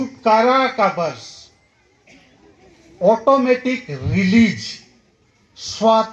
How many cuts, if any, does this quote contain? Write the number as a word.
zero